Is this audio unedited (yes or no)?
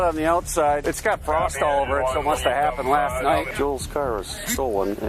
yes